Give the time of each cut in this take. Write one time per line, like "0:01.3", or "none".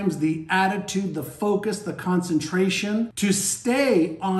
0:03.1